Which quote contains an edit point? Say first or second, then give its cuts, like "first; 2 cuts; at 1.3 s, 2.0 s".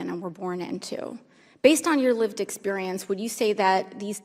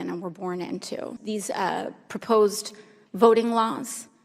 second; 1 cut; at 1.1 s